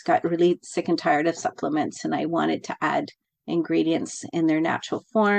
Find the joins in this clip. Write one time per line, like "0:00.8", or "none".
none